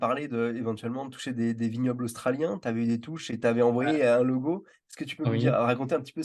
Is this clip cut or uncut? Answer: uncut